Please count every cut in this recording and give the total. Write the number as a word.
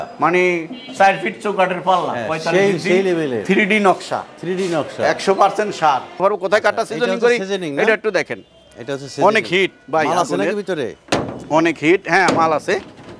one